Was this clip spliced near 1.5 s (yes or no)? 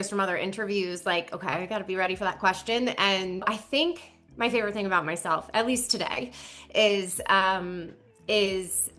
no